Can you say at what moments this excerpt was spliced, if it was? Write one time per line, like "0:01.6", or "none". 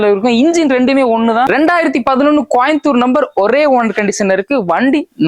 0:01.5